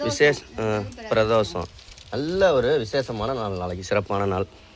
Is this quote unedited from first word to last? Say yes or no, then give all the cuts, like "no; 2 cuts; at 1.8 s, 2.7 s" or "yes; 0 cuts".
yes; 0 cuts